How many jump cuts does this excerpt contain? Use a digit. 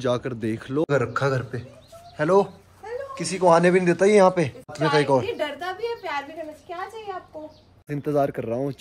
3